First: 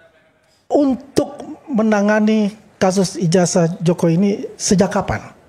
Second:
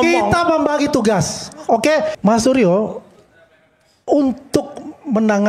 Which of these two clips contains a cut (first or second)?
second